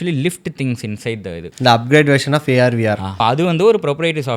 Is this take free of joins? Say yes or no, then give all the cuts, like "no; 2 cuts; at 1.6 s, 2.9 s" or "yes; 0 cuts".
no; 2 cuts; at 1.4 s, 3.1 s